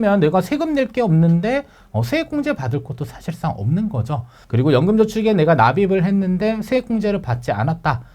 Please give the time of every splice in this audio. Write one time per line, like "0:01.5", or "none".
0:04.4